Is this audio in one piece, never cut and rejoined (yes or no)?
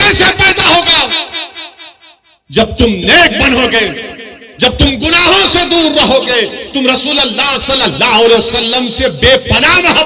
yes